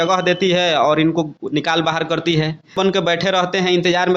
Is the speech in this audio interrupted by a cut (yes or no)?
yes